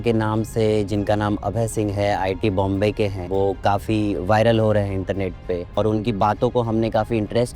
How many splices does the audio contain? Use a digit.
2